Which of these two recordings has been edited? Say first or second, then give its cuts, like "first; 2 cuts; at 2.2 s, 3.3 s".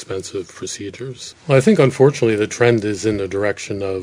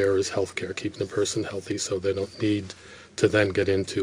first; 1 cut; at 1.2 s